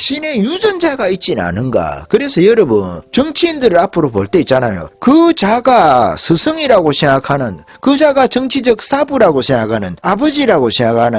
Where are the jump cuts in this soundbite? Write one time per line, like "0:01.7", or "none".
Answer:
0:03.0
0:04.8
0:09.9